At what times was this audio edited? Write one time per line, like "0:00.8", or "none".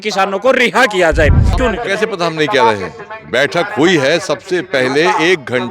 0:01.6